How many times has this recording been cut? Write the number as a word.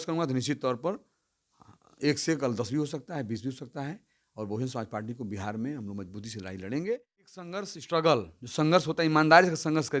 one